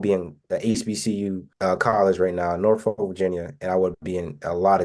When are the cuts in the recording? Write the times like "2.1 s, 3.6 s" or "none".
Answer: none